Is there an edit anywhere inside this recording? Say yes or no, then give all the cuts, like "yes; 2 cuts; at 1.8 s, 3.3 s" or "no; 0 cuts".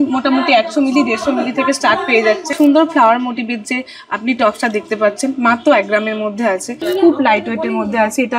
yes; 2 cuts; at 2.5 s, 6.8 s